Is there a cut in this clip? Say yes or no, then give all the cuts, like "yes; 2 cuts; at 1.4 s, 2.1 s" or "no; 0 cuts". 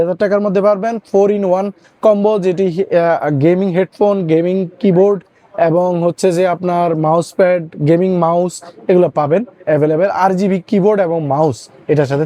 no; 0 cuts